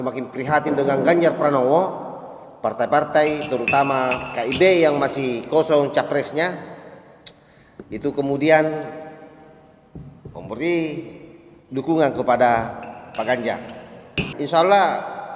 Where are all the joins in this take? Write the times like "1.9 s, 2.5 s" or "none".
14.3 s